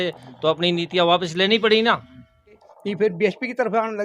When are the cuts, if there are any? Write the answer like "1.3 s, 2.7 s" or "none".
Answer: 2.7 s